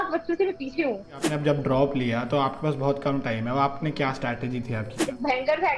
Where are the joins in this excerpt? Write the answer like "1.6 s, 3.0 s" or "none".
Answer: 1.3 s, 5.0 s

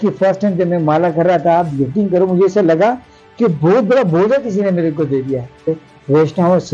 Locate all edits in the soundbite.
5.7 s

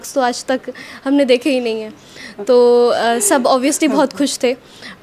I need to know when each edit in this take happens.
none

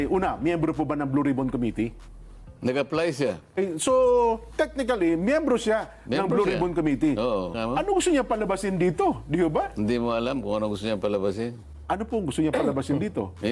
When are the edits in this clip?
3.6 s, 7.5 s, 11.7 s

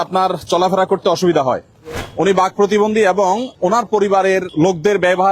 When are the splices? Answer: 2.0 s, 3.5 s, 4.5 s

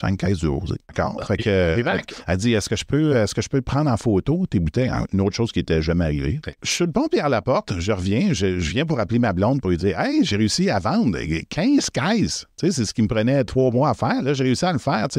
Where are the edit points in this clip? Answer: 0.9 s, 6.6 s

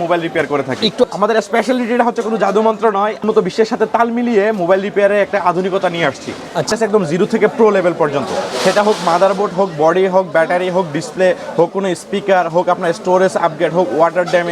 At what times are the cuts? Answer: 1.0 s, 3.2 s, 6.7 s

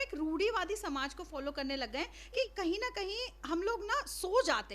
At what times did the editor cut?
2.4 s

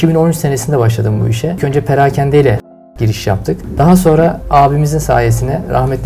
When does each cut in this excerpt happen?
1.6 s, 3.3 s, 4.4 s

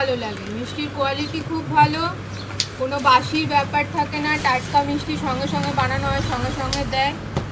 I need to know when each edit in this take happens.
none

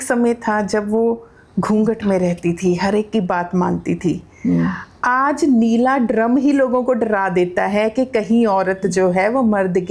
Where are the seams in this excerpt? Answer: none

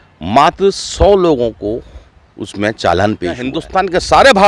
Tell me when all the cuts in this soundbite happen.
3.5 s

